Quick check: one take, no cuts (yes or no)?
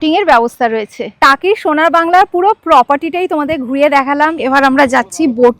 no